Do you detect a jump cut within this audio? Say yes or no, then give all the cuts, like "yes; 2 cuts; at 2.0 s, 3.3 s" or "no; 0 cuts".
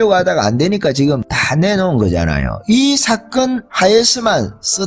yes; 1 cut; at 3.7 s